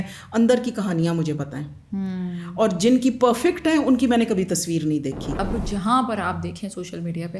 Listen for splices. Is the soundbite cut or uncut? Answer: cut